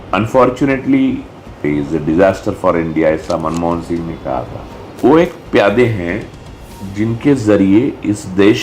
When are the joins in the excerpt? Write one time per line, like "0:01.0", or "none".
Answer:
0:01.6
0:04.9